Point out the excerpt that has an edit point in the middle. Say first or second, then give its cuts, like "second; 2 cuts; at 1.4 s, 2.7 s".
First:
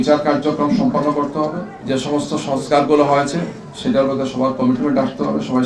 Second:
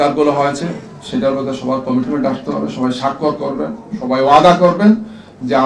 first; 1 cut; at 1.7 s